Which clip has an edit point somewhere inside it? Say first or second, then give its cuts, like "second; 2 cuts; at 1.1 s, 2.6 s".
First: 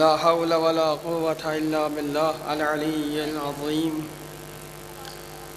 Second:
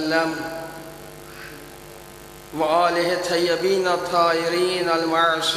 second; 1 cut; at 4.7 s